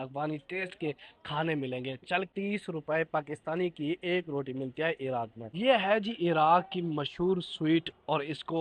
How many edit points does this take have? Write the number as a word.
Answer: two